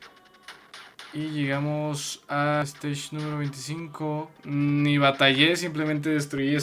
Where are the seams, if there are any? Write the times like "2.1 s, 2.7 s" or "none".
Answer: 2.6 s, 4.4 s